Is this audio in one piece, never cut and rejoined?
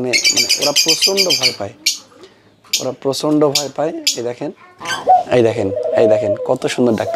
no; 1 cut; at 4.9 s

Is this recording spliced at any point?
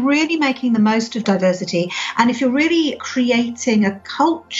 yes; 2 cuts; at 1.2 s, 3.0 s

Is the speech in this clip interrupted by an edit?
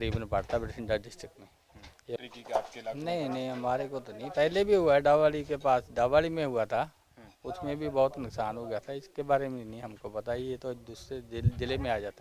yes; 1 cut; at 2.2 s

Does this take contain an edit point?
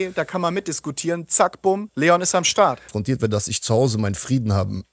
yes; 2 cuts; at 1.9 s, 2.9 s

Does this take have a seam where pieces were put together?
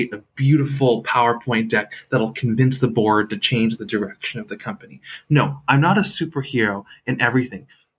no; 0 cuts

